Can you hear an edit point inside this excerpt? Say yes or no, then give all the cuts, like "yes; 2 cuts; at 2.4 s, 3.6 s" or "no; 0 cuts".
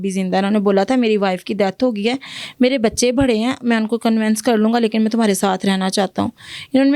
no; 0 cuts